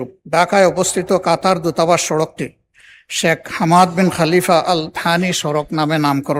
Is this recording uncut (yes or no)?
yes